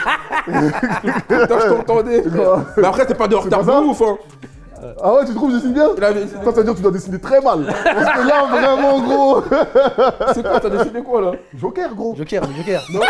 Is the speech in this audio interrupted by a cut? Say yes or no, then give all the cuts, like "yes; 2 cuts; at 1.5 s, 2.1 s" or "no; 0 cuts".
no; 0 cuts